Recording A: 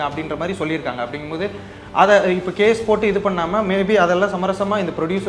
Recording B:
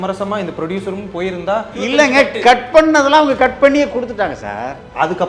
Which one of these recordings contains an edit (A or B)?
B